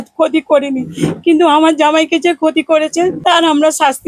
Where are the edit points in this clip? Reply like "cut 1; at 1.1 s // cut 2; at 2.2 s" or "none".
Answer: cut 1; at 3.2 s